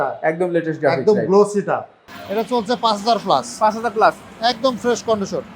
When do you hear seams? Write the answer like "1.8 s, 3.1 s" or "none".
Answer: 2.0 s